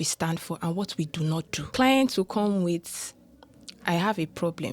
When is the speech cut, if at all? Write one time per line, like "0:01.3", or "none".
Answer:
0:01.6